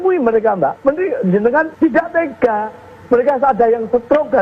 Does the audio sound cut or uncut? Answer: cut